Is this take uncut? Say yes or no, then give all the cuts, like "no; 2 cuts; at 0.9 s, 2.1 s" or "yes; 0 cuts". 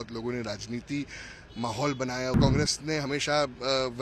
no; 1 cut; at 2.4 s